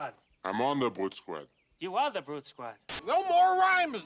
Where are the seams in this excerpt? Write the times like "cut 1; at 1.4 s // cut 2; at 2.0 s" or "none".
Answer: cut 1; at 2.8 s